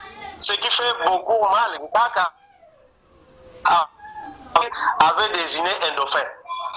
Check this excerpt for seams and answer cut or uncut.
uncut